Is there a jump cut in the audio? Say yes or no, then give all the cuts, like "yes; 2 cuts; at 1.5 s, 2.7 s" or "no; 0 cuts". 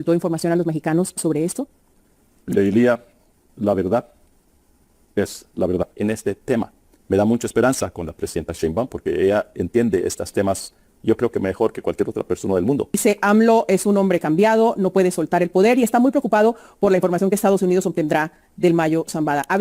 yes; 2 cuts; at 5.9 s, 13.0 s